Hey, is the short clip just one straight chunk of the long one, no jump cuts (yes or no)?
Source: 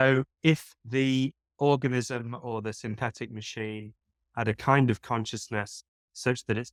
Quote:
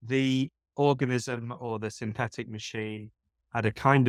yes